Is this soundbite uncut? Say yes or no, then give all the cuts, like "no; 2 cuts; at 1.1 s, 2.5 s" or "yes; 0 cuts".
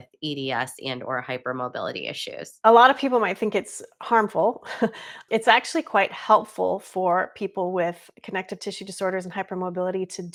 yes; 0 cuts